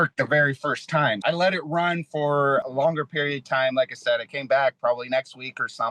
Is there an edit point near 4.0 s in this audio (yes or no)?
no